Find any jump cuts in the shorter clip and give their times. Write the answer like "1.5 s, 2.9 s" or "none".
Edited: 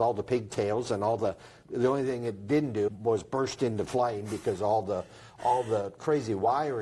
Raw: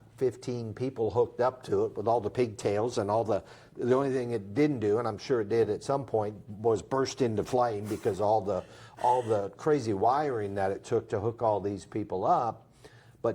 2.9 s